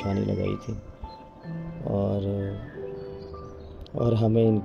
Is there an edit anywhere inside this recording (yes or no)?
no